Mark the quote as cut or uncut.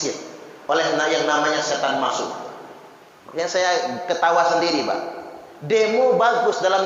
uncut